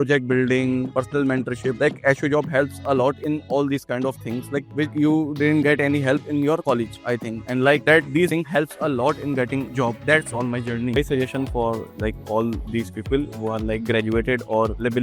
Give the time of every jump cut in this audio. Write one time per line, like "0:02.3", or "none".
0:11.0